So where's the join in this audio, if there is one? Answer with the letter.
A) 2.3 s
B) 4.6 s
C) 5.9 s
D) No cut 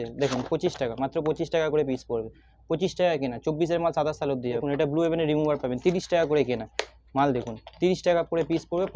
B